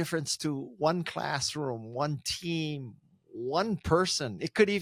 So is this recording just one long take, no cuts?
yes; 0 cuts

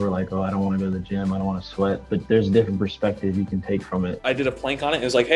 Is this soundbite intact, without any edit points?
no; 2 cuts; at 2.1 s, 4.2 s

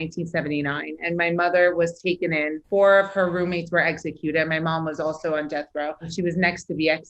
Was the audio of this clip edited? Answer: yes; 2 cuts; at 2.6 s, 6.1 s

